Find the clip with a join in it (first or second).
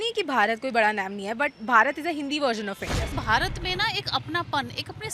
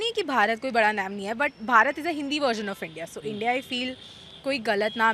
first